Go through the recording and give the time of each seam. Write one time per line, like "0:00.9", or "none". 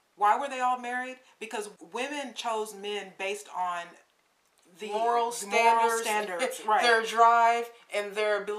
0:01.7

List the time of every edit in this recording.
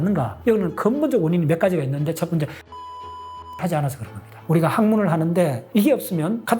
0:04.4

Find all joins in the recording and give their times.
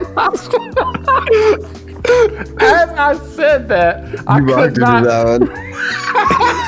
none

